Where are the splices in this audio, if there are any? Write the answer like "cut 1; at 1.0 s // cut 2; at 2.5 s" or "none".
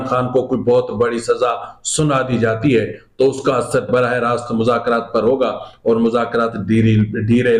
none